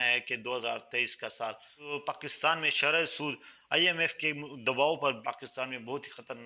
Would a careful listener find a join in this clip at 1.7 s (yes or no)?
yes